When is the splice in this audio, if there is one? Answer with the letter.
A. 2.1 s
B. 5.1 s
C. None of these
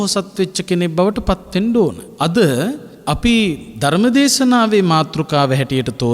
A